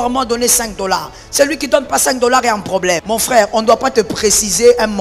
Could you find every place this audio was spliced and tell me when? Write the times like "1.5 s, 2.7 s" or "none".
3.0 s